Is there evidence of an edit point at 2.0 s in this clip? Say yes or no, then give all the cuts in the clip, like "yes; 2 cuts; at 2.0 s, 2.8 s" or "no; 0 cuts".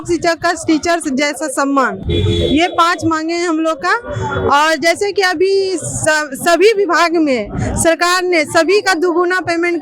no; 0 cuts